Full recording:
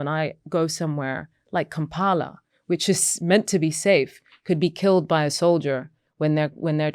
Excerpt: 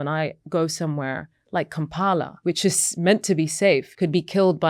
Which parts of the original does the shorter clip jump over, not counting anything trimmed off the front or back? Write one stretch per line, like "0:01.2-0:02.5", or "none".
0:02.3-0:02.6
0:04.1-0:04.4